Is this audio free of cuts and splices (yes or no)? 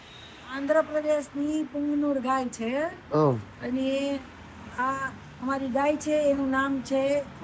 yes